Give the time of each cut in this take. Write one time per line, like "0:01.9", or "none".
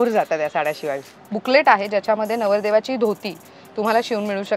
0:01.1